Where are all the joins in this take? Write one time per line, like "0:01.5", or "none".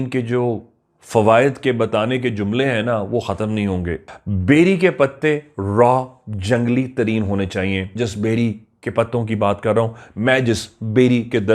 0:04.0
0:07.9

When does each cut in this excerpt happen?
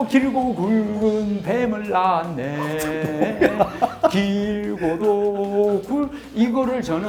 none

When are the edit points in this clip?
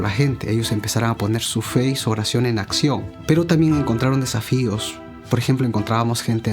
0:03.1

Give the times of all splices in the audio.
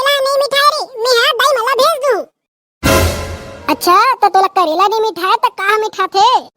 none

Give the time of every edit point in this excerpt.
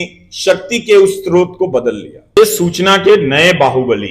0:02.4

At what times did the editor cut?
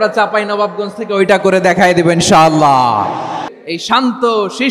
0:03.5

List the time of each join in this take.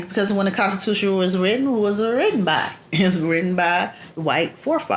0:04.1

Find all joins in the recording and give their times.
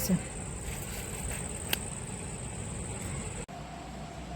0:03.4

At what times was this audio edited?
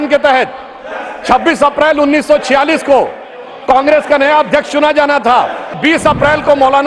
0:05.8

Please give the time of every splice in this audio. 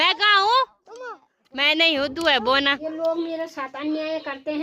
0:02.8

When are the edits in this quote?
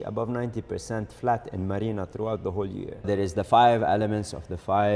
0:03.1

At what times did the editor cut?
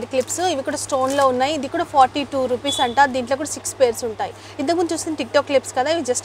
none

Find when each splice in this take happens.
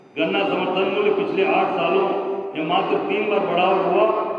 none

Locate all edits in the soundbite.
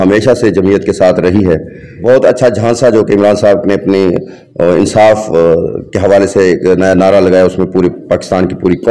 0:02.0

